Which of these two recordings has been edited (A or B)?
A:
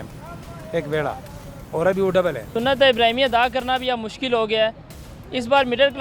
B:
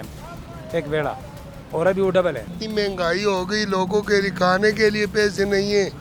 B